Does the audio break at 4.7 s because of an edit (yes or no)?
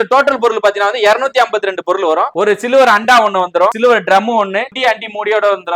yes